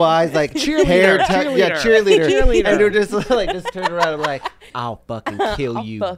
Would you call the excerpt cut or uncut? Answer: cut